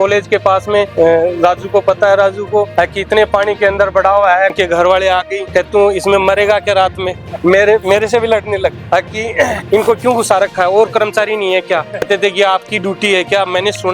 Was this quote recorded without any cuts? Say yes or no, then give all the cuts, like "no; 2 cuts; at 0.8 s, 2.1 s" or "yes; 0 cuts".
no; 8 cuts; at 0.9 s, 2.7 s, 4.5 s, 5.4 s, 7.3 s, 8.8 s, 9.6 s, 12.0 s